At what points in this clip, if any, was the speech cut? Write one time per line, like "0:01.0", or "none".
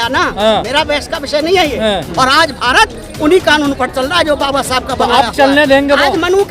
0:02.1